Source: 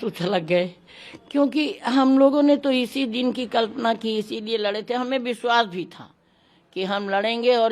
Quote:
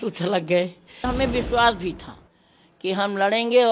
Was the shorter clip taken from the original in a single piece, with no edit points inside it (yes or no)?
no